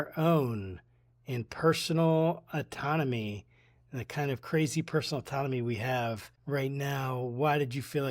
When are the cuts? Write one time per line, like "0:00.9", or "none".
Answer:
0:06.3